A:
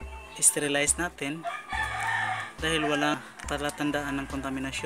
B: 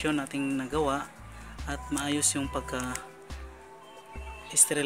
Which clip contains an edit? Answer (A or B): A